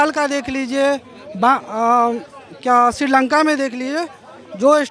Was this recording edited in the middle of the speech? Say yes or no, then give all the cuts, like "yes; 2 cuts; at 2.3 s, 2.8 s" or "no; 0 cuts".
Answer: no; 0 cuts